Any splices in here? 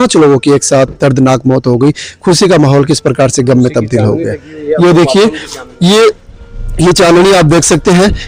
no; 0 cuts

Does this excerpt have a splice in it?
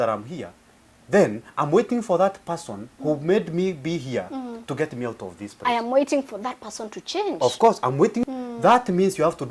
yes; 1 cut; at 8.3 s

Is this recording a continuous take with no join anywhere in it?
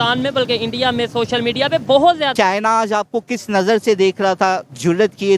no; 1 cut; at 2.3 s

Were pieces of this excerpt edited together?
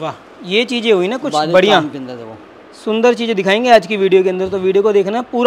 no; 0 cuts

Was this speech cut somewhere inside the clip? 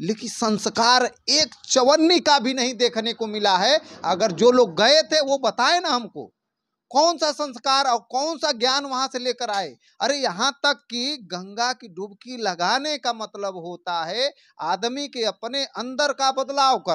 no; 0 cuts

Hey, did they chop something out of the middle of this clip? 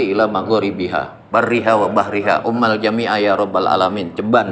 no; 0 cuts

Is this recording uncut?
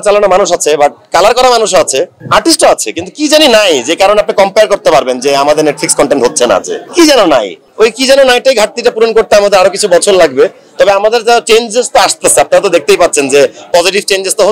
no; 3 cuts; at 2.2 s, 6.8 s, 7.6 s

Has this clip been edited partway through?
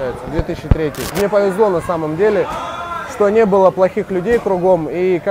yes; 1 cut; at 1.1 s

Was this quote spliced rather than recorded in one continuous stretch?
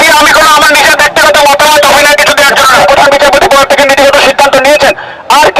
yes; 1 cut; at 2.8 s

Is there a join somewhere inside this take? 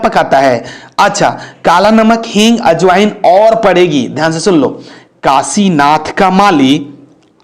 no; 0 cuts

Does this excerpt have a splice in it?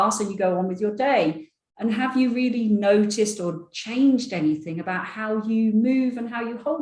no; 0 cuts

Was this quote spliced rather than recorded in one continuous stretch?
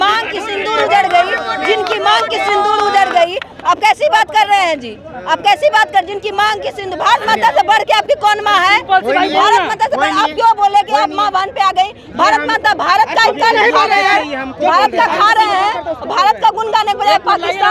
no; 0 cuts

